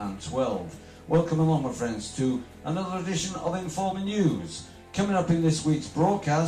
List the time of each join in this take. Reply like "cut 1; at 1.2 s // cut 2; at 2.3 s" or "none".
cut 1; at 4.5 s

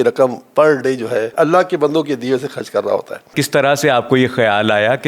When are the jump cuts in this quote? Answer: cut 1; at 1.3 s // cut 2; at 3.3 s

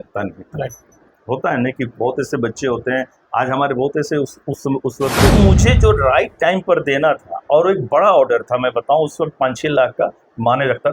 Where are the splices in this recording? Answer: cut 1; at 5.3 s

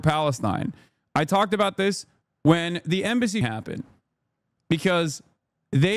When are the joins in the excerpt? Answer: cut 1; at 3.4 s

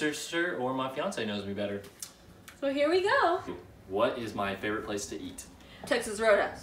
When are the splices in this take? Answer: cut 1; at 3.6 s

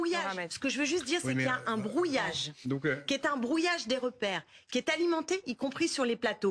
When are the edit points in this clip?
none

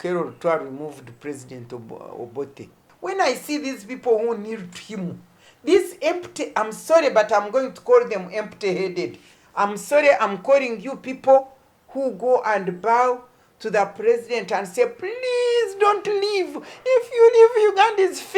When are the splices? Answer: cut 1; at 2.9 s

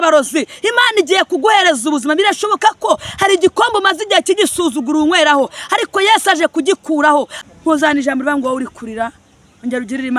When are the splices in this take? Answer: cut 1; at 7.3 s

